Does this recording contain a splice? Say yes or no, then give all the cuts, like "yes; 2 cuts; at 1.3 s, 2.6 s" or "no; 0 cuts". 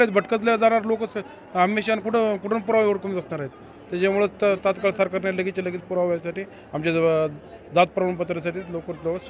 no; 0 cuts